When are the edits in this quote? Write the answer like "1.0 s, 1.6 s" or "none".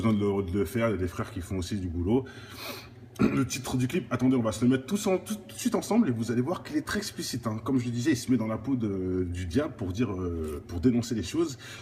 none